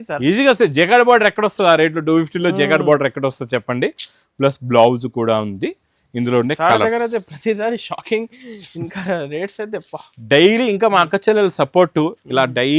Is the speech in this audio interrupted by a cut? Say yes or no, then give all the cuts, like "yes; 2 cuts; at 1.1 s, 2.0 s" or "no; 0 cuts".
no; 0 cuts